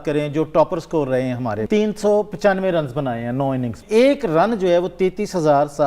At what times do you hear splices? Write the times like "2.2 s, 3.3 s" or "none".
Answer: 1.6 s, 3.8 s